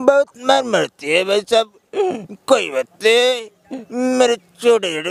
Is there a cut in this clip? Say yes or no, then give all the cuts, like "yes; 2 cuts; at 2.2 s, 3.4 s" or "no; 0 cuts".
no; 0 cuts